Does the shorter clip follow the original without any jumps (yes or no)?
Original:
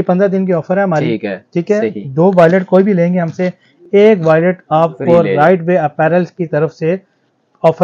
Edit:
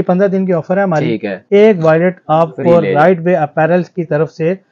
no